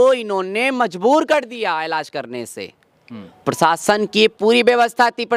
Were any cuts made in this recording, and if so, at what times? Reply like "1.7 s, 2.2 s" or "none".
none